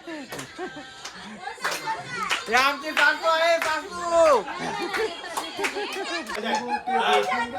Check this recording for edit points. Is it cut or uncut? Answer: cut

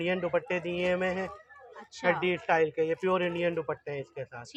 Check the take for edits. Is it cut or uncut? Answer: uncut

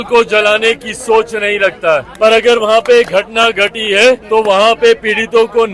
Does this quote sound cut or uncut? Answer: cut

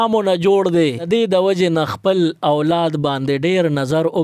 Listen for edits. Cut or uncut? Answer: cut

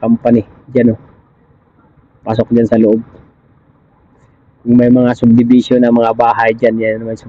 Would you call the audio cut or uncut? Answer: uncut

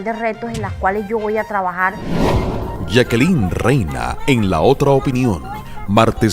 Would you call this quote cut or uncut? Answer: cut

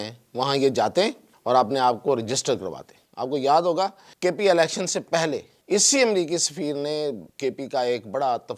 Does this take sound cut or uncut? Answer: cut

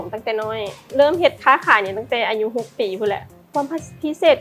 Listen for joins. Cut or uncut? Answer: cut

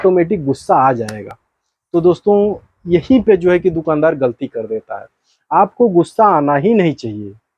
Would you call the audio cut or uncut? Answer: uncut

